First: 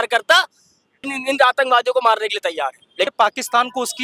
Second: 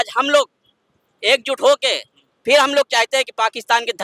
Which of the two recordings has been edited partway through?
first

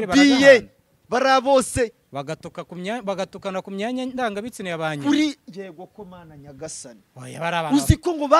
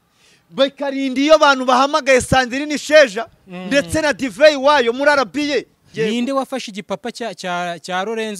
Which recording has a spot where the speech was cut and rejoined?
second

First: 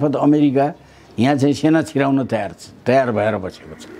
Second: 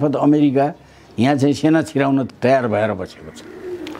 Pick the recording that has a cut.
second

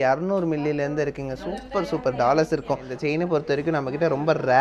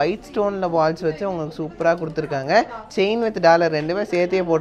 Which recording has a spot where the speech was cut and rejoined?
first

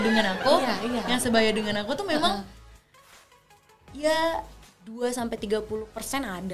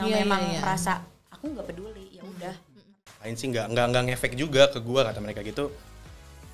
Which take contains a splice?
second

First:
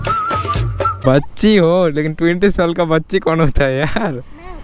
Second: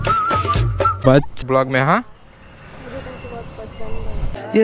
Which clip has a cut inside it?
second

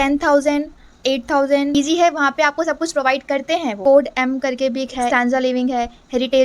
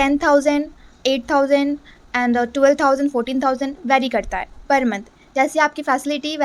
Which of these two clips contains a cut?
first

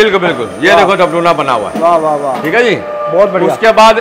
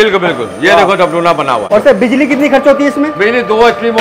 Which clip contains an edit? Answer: second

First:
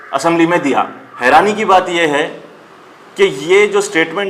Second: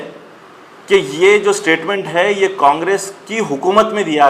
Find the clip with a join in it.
first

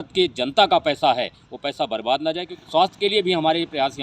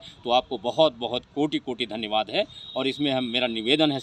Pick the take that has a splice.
first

